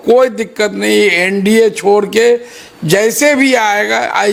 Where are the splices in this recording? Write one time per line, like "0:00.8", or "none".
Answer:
none